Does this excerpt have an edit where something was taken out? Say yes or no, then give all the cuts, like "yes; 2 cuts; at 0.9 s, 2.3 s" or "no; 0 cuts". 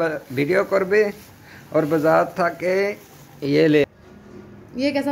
yes; 1 cut; at 3.8 s